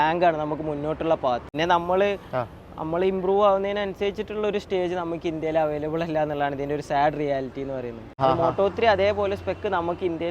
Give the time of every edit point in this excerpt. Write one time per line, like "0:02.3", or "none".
0:01.5
0:08.2